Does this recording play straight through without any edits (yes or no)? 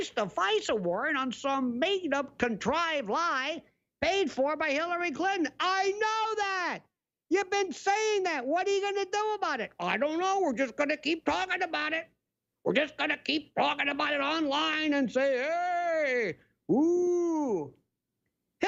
yes